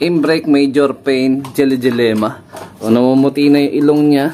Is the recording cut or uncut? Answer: cut